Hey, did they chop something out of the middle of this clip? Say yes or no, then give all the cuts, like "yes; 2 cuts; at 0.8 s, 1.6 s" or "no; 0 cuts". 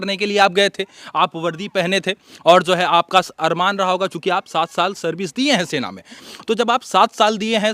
no; 0 cuts